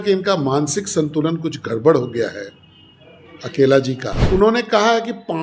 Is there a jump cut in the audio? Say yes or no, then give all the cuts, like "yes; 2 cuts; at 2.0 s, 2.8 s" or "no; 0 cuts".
yes; 1 cut; at 4.1 s